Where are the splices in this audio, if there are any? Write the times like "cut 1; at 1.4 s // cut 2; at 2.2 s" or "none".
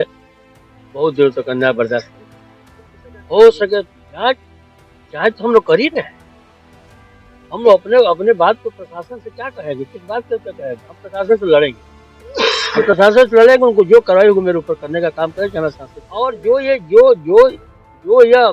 cut 1; at 16.3 s